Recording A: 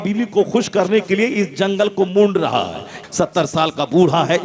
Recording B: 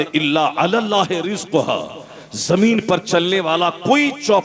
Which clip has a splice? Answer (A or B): A